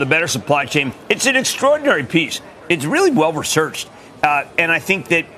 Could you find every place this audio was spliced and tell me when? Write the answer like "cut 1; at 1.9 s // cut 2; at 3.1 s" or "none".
none

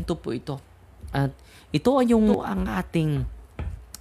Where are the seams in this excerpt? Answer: cut 1; at 2.4 s

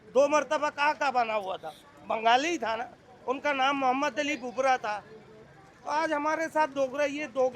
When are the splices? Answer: none

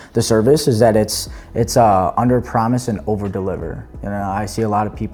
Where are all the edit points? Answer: none

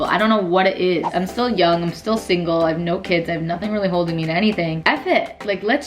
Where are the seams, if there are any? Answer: cut 1; at 1.1 s

